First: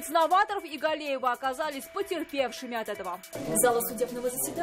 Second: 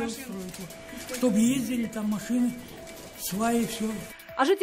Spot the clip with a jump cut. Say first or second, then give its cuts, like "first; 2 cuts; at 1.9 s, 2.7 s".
first; 1 cut; at 3.3 s